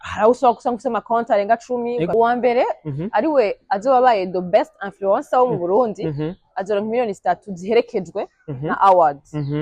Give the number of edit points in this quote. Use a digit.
1